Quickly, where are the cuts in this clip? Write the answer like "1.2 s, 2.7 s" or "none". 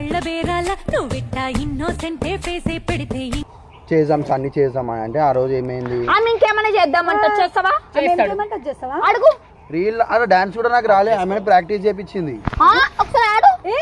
3.5 s